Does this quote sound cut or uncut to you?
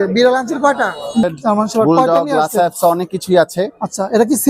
cut